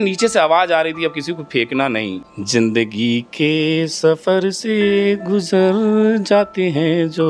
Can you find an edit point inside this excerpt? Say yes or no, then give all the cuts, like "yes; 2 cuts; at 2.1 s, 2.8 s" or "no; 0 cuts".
yes; 1 cut; at 2.3 s